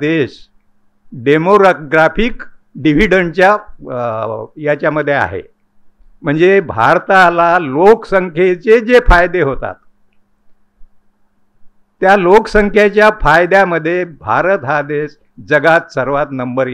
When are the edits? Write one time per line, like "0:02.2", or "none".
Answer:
none